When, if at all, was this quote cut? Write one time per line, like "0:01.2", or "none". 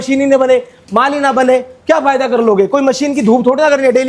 none